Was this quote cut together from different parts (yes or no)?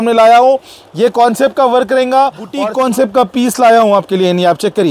yes